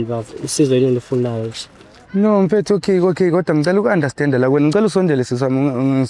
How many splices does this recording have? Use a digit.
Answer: 0